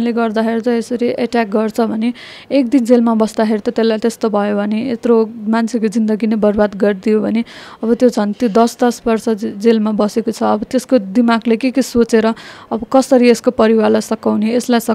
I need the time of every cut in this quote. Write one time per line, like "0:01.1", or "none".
none